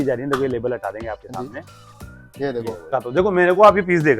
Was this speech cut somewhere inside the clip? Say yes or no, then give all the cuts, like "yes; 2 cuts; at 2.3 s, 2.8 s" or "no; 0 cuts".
yes; 1 cut; at 3.0 s